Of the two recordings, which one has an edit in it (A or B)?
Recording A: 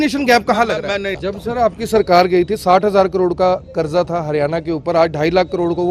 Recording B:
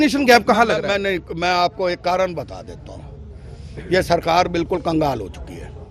A